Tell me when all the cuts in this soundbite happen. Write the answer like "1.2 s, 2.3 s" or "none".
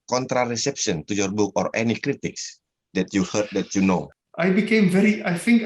4.1 s

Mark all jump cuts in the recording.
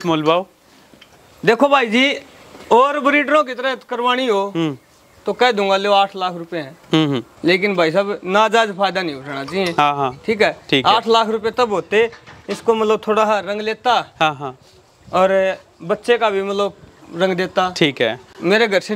7.3 s

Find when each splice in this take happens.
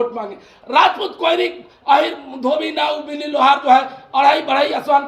none

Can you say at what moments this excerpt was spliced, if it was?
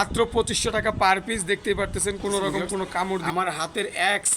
3.2 s

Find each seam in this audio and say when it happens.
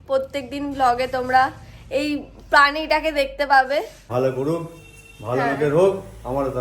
4.1 s

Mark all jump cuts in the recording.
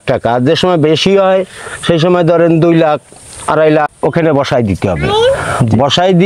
3.9 s

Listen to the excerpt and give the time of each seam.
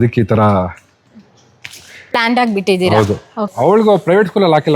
3.5 s

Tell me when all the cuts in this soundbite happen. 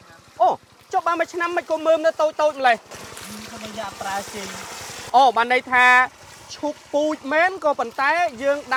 none

